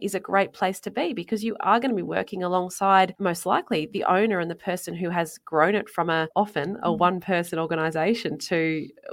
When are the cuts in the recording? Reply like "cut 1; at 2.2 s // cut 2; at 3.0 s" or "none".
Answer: cut 1; at 3.1 s // cut 2; at 6.3 s